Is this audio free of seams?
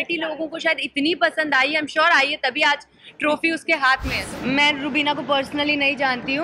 no; 1 cut; at 4.1 s

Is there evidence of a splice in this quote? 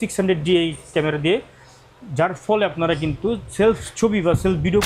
no; 0 cuts

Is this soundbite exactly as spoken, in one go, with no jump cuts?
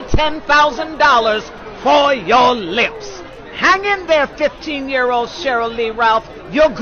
yes; 0 cuts

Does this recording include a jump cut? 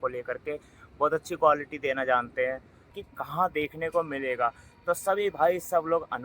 yes; 1 cut; at 2.9 s

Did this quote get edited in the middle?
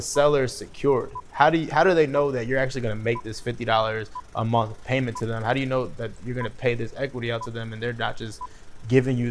no; 0 cuts

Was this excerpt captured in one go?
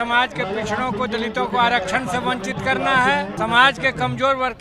no; 1 cut; at 3.3 s

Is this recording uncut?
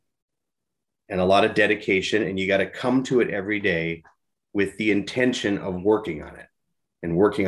yes; 0 cuts

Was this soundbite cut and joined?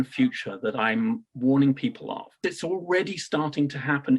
yes; 1 cut; at 2.4 s

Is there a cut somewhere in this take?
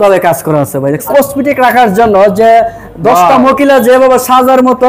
yes; 1 cut; at 1.1 s

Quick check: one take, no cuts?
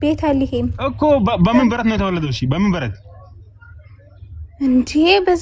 yes; 0 cuts

